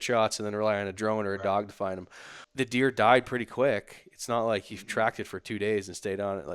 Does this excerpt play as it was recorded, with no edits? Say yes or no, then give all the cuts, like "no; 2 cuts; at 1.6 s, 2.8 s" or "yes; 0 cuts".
no; 1 cut; at 2.4 s